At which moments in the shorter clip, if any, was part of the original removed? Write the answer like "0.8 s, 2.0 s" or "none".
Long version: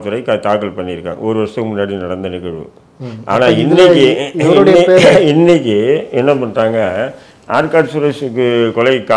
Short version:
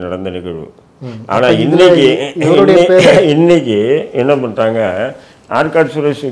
none